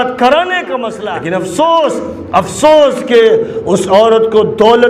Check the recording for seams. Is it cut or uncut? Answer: cut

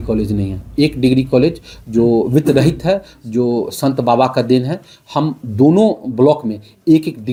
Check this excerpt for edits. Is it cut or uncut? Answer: uncut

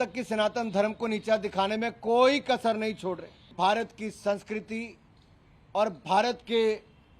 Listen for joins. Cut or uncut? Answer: cut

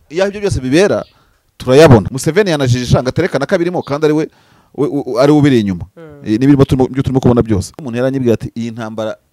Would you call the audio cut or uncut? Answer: cut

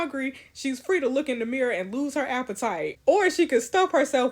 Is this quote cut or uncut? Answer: cut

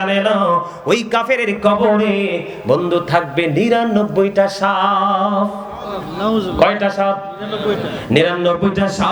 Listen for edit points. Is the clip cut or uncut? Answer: uncut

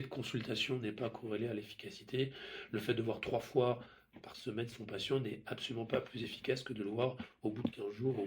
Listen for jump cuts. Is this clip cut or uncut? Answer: uncut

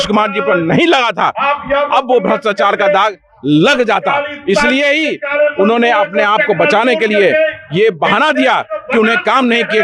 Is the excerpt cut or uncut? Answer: uncut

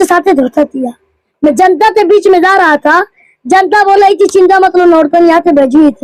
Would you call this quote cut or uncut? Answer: uncut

